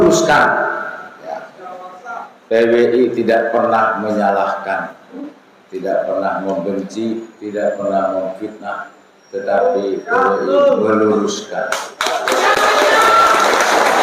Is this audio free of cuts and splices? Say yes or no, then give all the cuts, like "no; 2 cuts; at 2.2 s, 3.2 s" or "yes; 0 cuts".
yes; 0 cuts